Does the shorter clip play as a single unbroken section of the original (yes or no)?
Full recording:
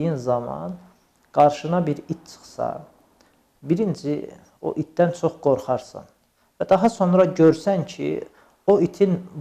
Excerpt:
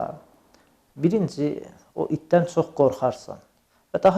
yes